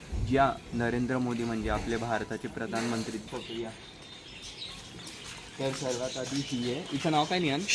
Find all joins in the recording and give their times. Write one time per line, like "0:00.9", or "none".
0:03.2